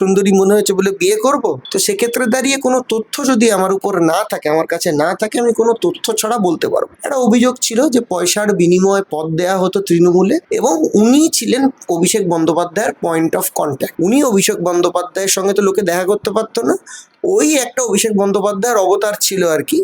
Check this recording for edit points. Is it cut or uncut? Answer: uncut